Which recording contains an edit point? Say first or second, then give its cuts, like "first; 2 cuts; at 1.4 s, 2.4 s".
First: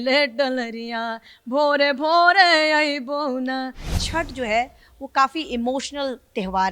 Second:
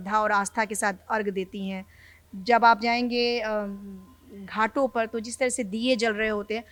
first; 1 cut; at 3.9 s